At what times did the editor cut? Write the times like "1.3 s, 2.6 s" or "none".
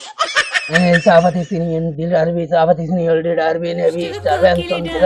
none

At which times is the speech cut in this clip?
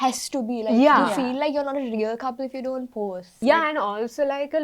3.3 s

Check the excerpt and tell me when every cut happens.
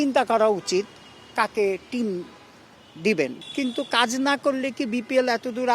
3.3 s

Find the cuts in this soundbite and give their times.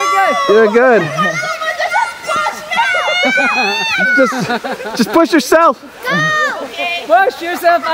none

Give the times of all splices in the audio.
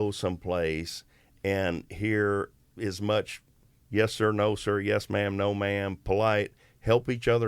2.6 s

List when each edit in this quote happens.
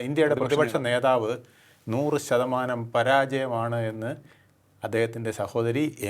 none

